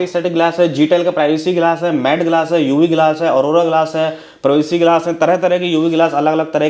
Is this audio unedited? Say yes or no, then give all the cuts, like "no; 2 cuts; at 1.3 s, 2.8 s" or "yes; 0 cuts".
yes; 0 cuts